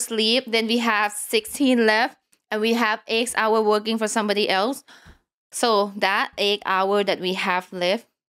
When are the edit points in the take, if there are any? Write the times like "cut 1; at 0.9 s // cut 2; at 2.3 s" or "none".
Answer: none